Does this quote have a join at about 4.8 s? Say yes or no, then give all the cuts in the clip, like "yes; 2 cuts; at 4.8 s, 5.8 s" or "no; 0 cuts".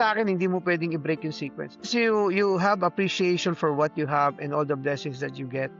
no; 1 cut; at 1.9 s